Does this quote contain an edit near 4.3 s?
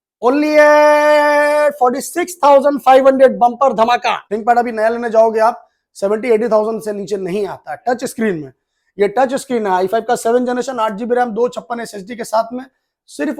yes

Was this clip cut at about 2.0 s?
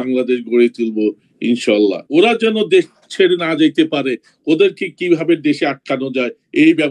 yes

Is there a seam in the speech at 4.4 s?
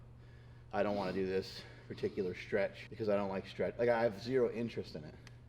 no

